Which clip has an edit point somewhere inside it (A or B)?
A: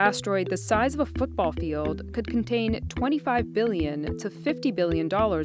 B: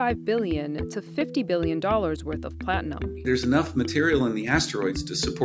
B